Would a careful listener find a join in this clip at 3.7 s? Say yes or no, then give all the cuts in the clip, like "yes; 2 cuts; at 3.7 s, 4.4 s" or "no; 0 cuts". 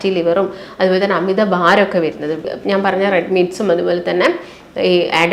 no; 1 cut; at 2.5 s